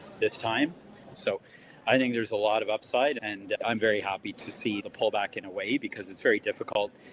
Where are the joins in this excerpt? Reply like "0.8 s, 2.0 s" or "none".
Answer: 1.1 s